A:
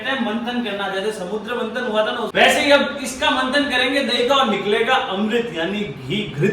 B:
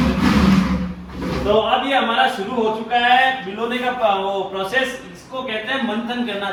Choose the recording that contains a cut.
A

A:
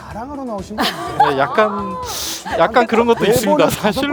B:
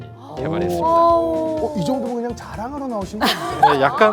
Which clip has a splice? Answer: B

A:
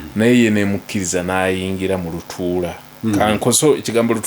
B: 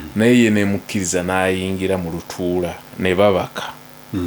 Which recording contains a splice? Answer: B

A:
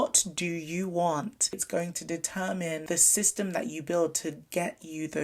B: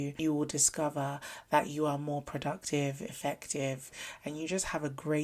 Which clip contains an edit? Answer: A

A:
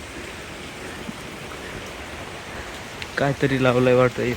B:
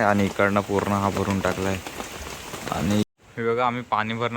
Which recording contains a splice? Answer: B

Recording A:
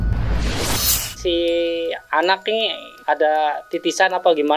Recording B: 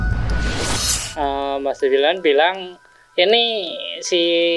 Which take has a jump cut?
A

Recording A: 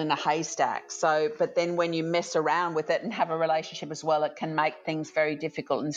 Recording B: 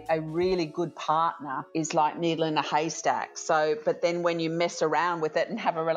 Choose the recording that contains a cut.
B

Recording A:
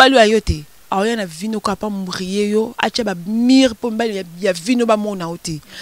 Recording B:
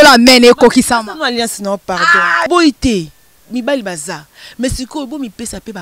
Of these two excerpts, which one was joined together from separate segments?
B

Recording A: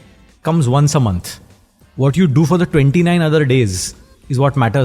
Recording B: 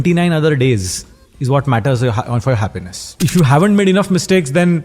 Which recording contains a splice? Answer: B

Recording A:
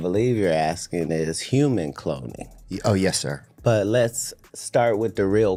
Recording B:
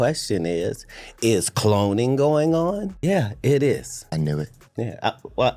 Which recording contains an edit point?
B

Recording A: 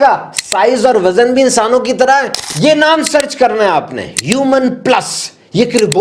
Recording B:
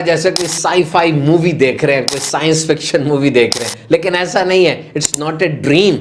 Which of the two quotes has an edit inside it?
A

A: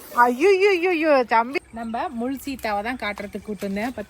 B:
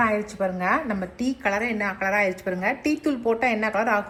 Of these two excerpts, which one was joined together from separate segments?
A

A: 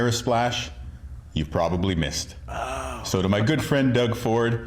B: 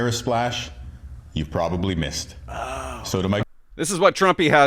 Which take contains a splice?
B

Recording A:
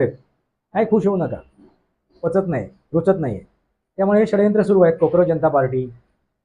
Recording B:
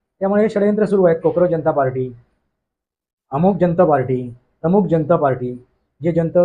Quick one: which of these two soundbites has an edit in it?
A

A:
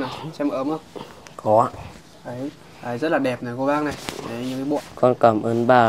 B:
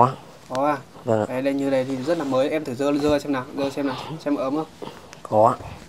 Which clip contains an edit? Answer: A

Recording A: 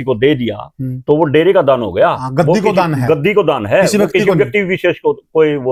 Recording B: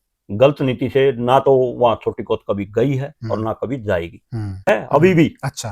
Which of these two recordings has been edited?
B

